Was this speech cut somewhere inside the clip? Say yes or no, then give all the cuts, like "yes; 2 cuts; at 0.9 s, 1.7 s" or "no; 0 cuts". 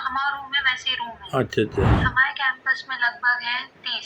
yes; 1 cut; at 2.0 s